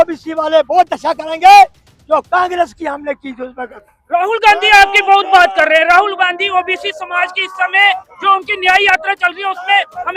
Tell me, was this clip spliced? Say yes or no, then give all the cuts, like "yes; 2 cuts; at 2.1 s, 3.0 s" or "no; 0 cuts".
no; 0 cuts